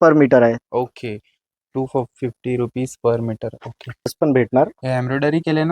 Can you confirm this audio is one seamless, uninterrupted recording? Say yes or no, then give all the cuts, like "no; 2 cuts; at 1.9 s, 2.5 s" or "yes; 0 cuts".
no; 1 cut; at 4.1 s